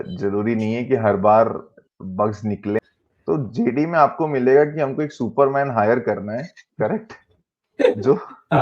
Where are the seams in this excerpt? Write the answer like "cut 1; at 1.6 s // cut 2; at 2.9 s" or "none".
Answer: cut 1; at 2.8 s